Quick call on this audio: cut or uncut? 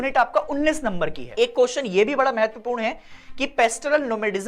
cut